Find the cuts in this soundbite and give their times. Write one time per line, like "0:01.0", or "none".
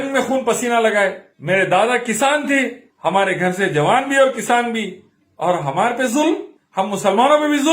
0:01.3
0:02.8
0:06.6